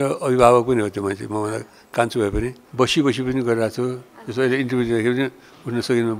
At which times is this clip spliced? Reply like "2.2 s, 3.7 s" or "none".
2.6 s